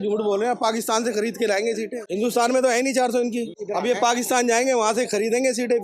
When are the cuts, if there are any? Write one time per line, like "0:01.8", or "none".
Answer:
0:02.0
0:03.6

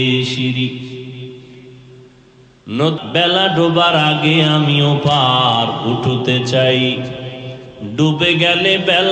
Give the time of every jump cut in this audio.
0:03.0

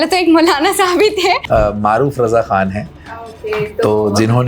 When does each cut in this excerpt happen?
0:01.4

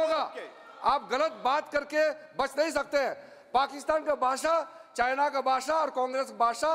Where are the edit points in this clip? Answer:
none

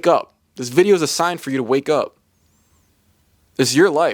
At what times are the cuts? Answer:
none

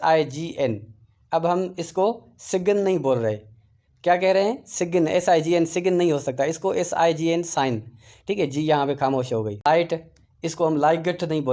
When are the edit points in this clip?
0:09.6

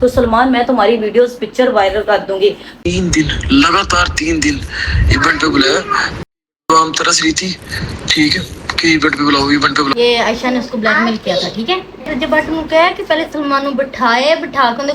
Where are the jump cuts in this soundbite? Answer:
0:02.7
0:12.1

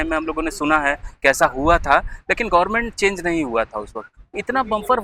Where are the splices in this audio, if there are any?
none

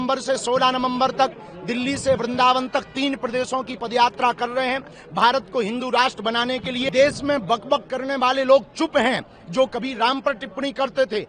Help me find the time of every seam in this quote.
0:06.9

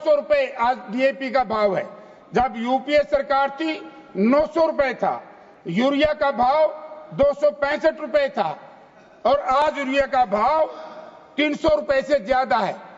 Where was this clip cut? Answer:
none

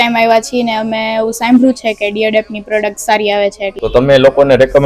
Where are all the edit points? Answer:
none

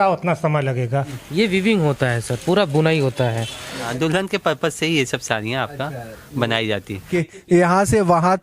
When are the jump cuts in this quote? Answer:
0:01.2
0:03.8
0:07.1

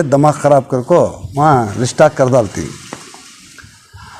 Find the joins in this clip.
none

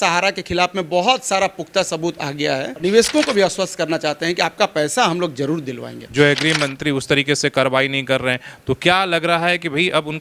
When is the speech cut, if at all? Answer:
0:02.8
0:06.1

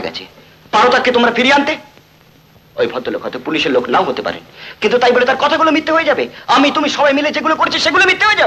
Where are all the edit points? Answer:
none

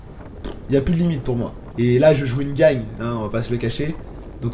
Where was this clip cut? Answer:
0:01.6

